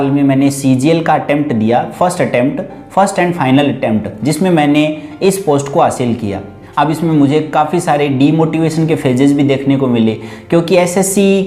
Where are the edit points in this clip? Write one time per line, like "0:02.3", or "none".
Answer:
none